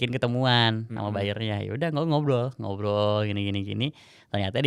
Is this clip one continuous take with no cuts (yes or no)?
yes